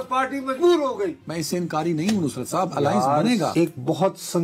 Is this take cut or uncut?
cut